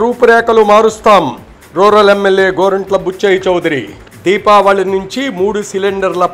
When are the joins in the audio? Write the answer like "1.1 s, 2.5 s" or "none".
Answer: none